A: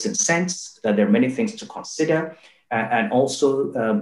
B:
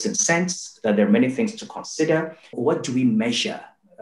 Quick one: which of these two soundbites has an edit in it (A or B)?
B